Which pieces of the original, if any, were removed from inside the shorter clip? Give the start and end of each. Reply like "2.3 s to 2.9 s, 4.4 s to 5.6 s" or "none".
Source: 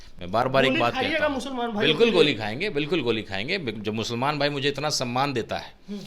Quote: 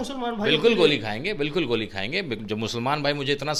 none